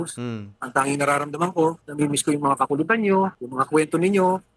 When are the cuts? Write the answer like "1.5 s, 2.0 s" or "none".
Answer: 1.8 s, 3.4 s